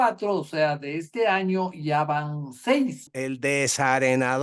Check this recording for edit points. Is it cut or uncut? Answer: cut